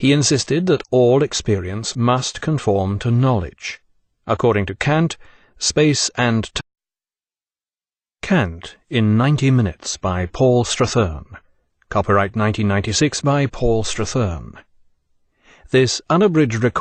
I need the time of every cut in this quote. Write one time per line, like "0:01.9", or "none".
none